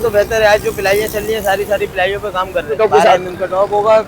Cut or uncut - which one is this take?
cut